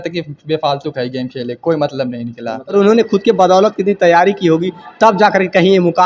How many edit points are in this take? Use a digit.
1